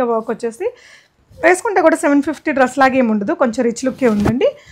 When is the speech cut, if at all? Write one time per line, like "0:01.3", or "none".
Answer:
none